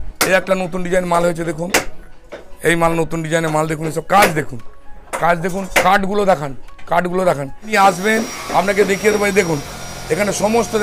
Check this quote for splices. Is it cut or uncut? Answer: cut